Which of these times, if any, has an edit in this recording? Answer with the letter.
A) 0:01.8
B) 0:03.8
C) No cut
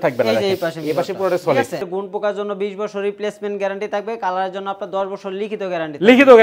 A